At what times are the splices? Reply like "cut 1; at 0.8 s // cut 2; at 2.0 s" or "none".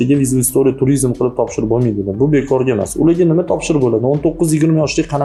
none